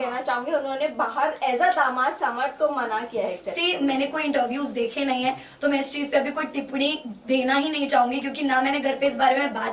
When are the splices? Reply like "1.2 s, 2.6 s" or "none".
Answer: none